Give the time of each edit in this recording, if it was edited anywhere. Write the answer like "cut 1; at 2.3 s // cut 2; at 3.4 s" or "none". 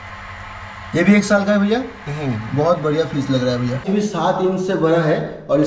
cut 1; at 3.9 s